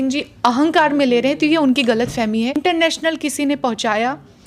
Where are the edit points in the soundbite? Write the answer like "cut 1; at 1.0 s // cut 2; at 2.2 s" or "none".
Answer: cut 1; at 2.6 s